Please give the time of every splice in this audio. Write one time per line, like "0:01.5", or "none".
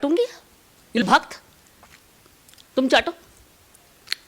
0:01.0